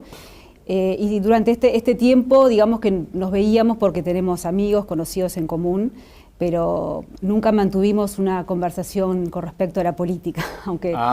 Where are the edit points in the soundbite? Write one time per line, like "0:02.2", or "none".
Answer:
0:09.4